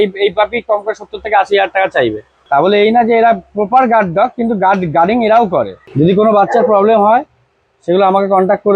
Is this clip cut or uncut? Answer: cut